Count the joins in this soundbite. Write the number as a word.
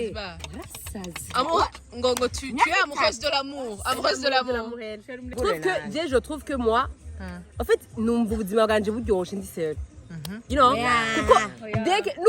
one